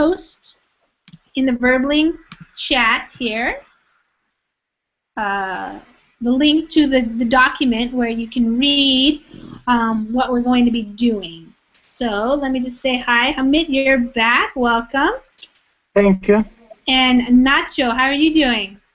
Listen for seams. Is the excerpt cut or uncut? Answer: uncut